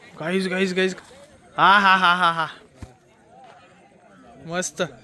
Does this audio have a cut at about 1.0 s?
yes; 1 cut; at 1.0 s

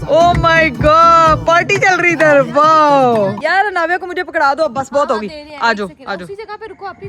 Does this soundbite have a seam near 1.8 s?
no; 1 cut; at 3.4 s

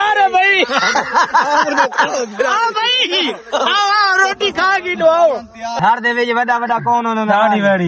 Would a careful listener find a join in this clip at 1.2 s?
no; 1 cut; at 5.7 s

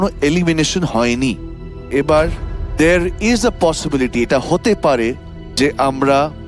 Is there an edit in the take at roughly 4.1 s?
no; 1 cut; at 1.9 s

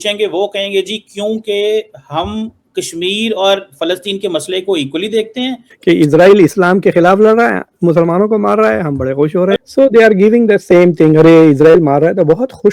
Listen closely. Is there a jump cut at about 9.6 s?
yes; 2 cuts; at 5.7 s, 9.6 s

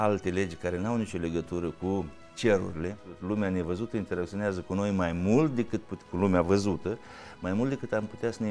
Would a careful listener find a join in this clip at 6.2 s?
no; 1 cut; at 3.1 s

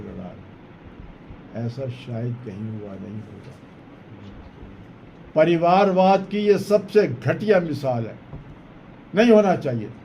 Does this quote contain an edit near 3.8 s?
yes; 1 cut; at 3.8 s

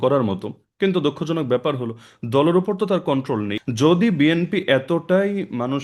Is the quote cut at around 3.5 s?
yes; 1 cut; at 3.5 s

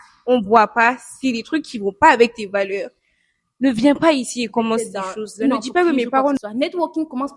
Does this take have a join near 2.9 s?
no; 1 cut; at 6.4 s

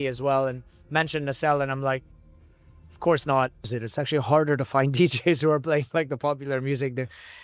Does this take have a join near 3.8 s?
yes; 1 cut; at 3.8 s

